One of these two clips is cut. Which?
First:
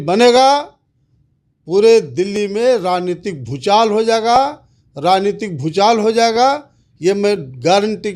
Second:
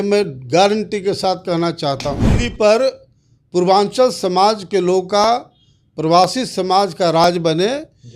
second; 1 cut; at 2.3 s

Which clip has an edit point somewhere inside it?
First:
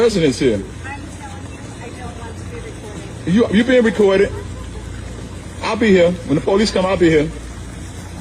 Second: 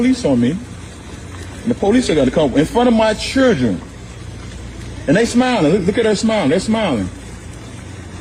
first; 1 cut; at 7.2 s

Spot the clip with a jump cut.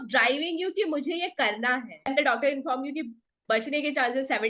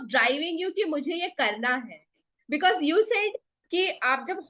first; 1 cut; at 2.1 s

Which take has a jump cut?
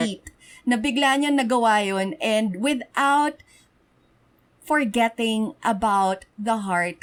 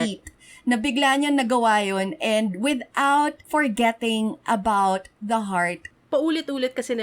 second; 2 cuts; at 3.4 s, 5.9 s

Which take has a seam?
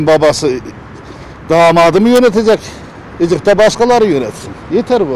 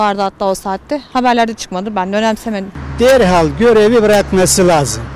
second; 1 cut; at 2.7 s

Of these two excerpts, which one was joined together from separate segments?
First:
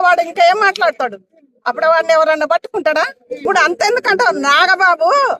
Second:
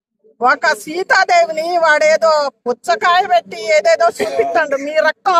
first; 1 cut; at 3.4 s

